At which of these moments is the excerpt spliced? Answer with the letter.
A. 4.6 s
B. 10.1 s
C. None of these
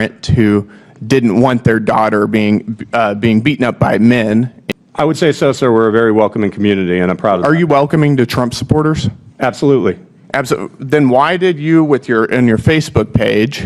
A